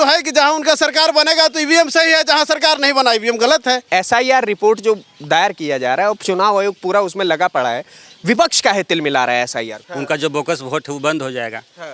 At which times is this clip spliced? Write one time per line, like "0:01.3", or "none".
0:03.8
0:09.8